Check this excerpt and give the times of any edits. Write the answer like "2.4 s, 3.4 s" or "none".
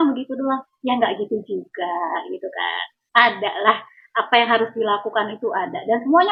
none